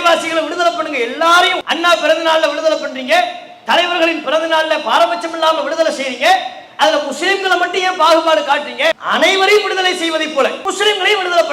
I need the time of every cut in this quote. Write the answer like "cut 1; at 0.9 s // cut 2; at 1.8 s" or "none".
cut 1; at 1.6 s // cut 2; at 9.0 s // cut 3; at 10.6 s